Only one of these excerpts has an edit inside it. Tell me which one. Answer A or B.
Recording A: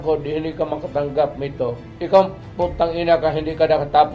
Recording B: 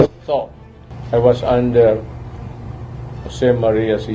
A